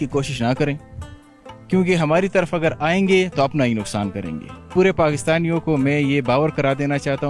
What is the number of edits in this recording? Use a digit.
1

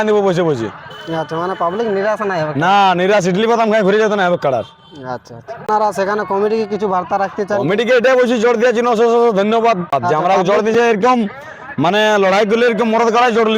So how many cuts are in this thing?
2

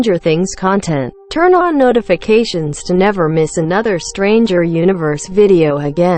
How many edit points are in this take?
1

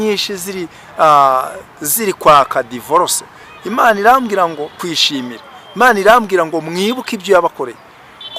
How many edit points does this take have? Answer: 1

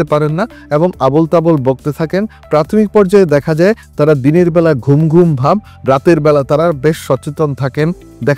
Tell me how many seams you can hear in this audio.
0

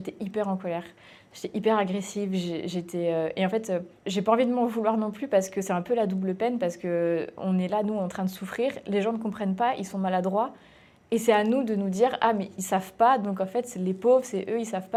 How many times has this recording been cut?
0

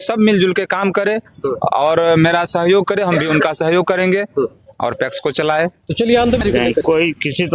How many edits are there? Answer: 1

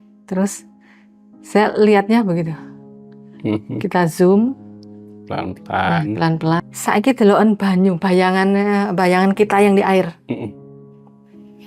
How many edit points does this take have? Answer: 1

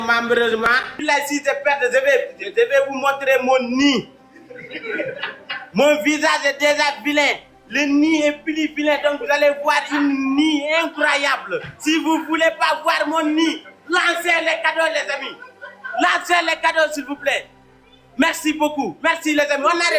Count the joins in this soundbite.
1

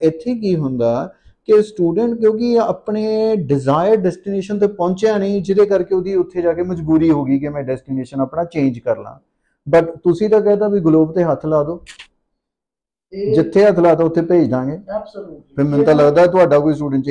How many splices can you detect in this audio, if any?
0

